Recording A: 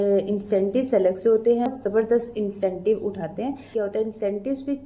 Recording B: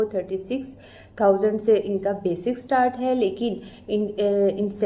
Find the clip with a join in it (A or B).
A